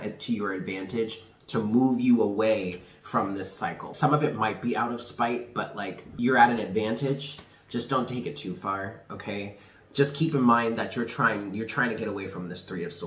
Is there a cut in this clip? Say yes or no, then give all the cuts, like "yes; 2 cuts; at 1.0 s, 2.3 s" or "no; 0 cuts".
yes; 2 cuts; at 3.9 s, 6.1 s